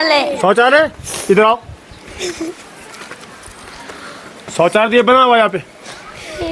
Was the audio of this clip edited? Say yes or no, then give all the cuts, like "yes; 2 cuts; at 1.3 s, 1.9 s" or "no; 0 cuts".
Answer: no; 0 cuts